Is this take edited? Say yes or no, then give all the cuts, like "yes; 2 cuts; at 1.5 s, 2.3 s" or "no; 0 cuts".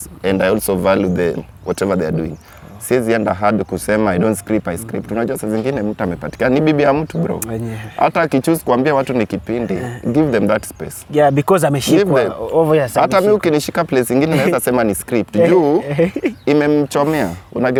no; 0 cuts